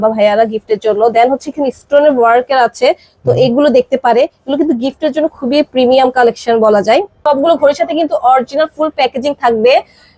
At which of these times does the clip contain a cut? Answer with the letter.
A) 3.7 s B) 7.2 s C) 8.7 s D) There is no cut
B